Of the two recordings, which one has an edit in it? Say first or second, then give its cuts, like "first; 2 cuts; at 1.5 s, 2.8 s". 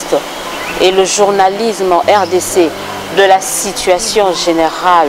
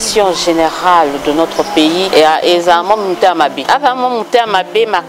second; 2 cuts; at 2.1 s, 3.6 s